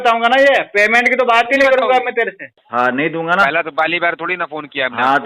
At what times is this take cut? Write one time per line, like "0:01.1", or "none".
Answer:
0:02.5